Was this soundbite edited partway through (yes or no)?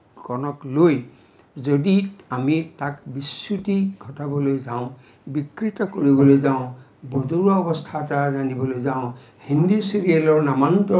no